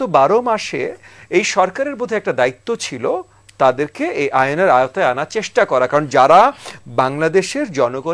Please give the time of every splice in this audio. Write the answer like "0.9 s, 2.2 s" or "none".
none